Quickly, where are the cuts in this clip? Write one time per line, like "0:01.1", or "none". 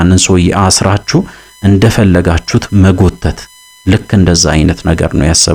none